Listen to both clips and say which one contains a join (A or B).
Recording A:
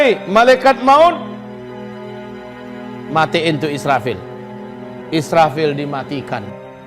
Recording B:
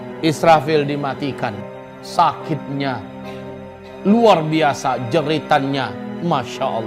A